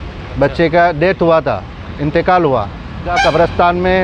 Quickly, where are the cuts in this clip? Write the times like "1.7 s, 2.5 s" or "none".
3.1 s